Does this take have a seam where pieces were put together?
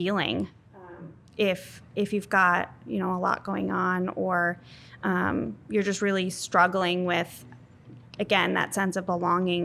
no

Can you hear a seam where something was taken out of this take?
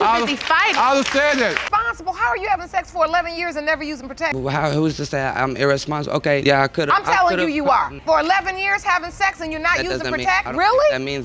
yes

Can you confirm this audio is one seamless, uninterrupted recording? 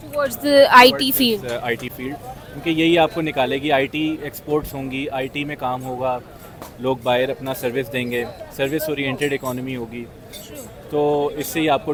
yes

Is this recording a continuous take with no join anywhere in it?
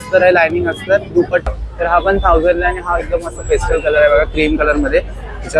no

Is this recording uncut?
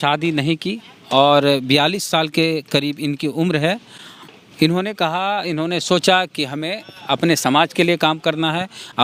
yes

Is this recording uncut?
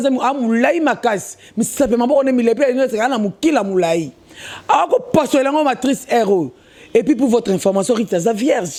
yes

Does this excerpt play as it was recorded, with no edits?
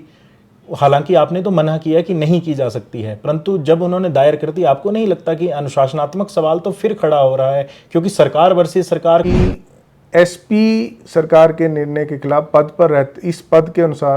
no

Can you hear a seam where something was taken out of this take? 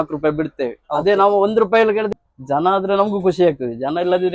yes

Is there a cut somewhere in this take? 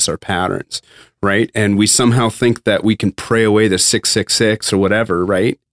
yes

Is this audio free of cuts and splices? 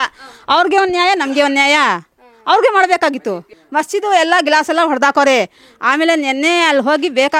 yes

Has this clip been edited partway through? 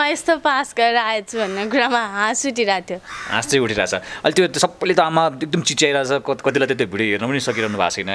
no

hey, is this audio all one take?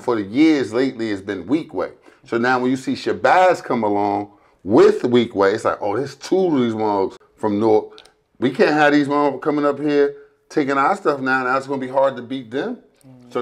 no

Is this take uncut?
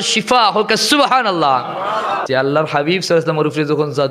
no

